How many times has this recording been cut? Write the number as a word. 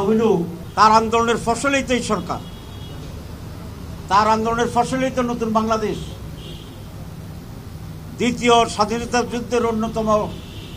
zero